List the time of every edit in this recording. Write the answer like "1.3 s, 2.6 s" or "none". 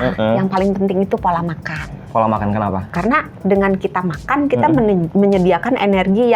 2.0 s, 2.9 s